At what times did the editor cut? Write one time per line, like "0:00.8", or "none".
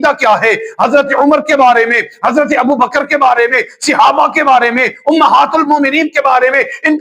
none